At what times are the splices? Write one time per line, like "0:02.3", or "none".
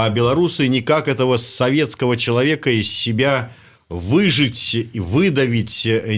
none